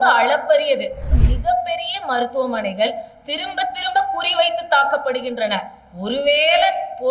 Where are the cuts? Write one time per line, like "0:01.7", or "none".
0:01.1

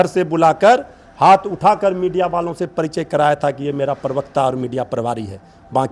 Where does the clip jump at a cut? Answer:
none

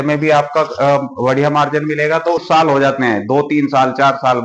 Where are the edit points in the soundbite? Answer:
0:02.4

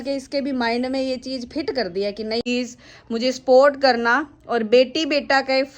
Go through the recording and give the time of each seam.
0:02.4

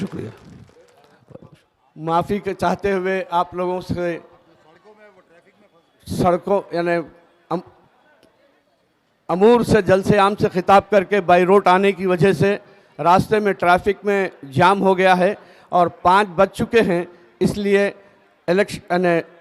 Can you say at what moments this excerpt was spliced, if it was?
0:01.7

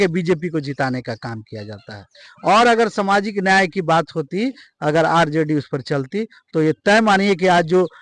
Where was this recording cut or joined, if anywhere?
none

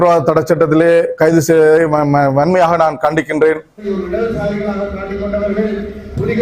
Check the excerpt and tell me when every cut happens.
0:03.9

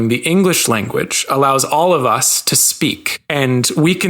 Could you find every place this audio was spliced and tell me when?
0:03.1

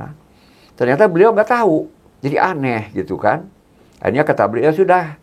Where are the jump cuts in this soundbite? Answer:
0:02.0

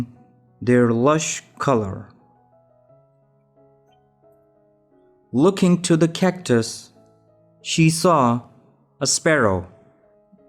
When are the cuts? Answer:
0:02.6
0:04.9

